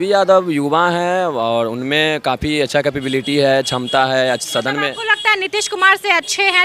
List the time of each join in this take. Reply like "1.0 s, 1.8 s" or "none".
none